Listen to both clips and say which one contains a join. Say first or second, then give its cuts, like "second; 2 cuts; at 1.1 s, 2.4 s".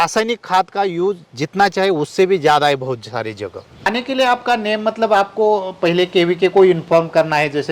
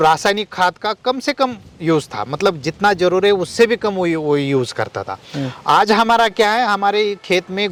first; 1 cut; at 3.9 s